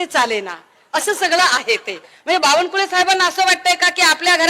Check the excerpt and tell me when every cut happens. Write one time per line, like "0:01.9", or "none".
0:02.1

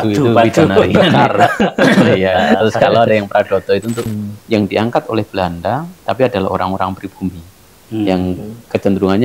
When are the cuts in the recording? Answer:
0:04.1

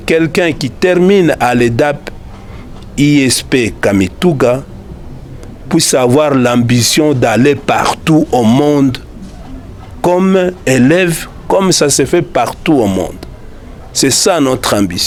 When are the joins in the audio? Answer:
none

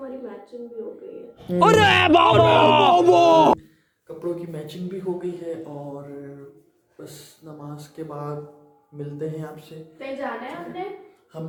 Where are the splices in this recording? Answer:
none

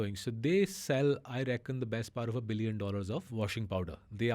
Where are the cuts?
0:03.3

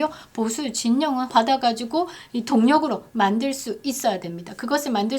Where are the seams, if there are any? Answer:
0:01.3

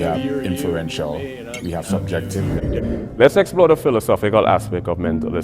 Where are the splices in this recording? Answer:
none

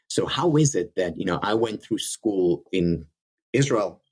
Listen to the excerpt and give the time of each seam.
0:02.7

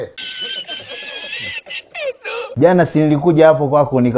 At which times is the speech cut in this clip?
0:02.6

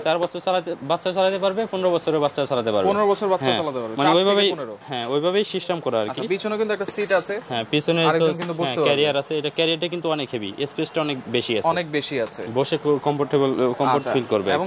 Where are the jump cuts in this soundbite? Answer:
none

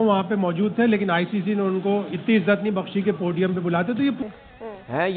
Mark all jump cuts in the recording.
0:04.2

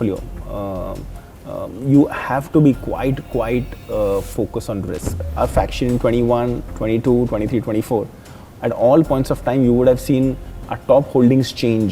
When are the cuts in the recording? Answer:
0:05.2

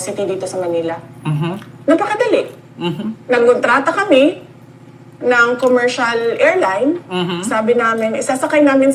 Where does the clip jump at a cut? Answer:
none

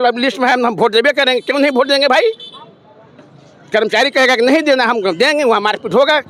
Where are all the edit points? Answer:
none

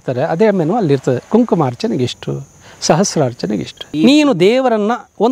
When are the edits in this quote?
0:03.8

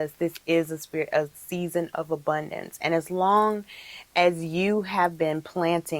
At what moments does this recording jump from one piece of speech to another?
none

